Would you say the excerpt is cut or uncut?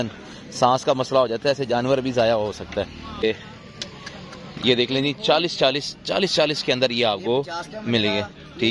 cut